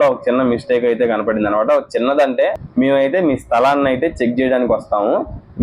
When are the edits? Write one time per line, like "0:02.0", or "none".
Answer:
0:02.6